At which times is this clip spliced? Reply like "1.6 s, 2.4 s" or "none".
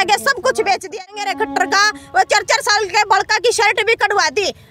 1.1 s